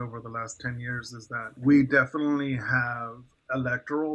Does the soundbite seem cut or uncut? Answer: cut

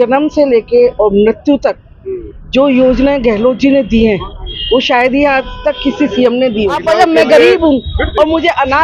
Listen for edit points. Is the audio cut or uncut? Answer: cut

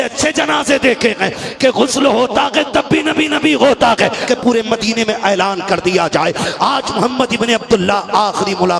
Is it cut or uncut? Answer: cut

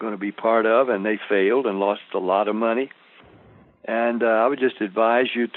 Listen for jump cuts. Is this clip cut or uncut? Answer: uncut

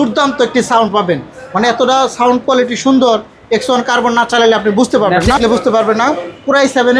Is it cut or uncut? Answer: cut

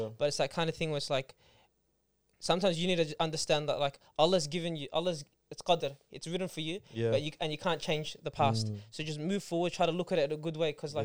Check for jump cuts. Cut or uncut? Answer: uncut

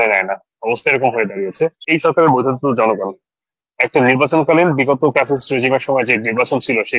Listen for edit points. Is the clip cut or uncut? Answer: cut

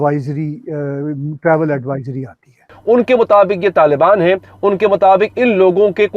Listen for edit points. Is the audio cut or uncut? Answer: cut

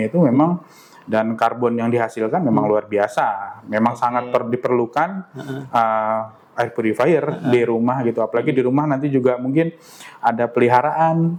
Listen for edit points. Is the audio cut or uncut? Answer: uncut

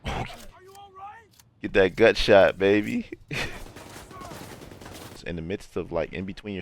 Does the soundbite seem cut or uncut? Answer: cut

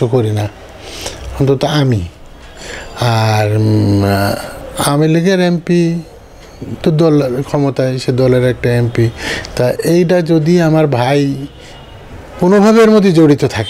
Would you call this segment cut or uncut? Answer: uncut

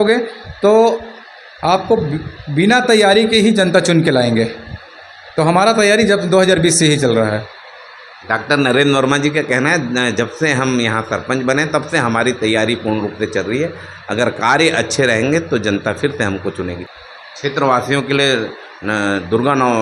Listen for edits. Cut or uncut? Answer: uncut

